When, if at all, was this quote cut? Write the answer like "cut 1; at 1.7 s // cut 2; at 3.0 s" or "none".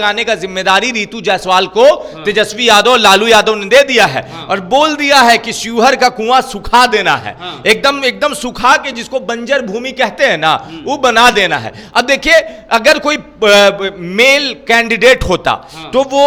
none